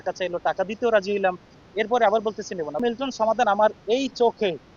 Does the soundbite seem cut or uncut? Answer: cut